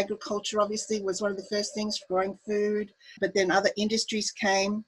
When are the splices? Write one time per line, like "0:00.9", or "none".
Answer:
0:03.1